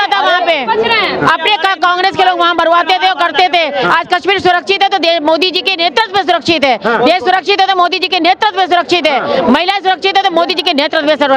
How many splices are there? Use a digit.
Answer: 0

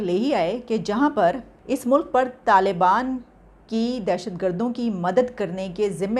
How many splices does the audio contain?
1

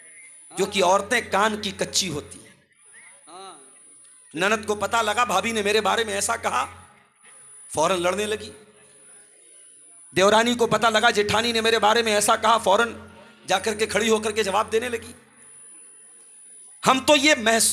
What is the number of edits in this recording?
0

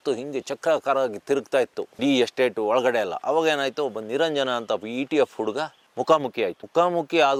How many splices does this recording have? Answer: 0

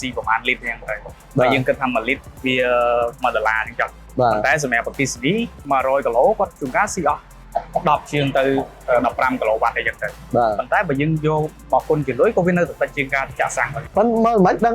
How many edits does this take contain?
1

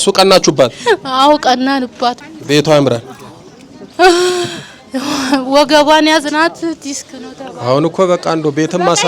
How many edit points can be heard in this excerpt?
1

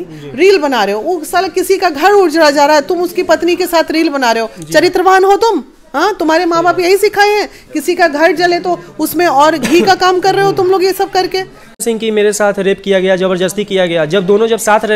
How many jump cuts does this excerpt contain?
1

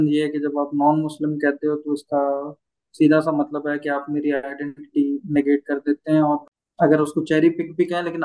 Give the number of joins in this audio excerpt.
1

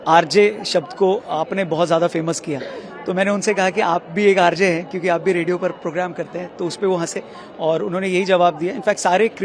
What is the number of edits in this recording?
0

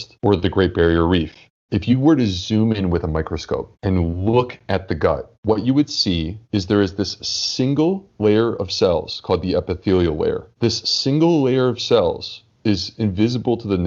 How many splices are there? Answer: 1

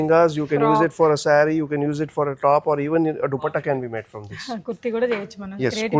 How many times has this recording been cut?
0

